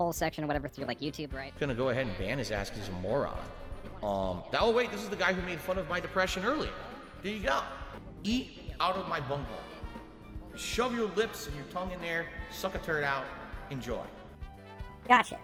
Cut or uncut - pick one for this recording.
uncut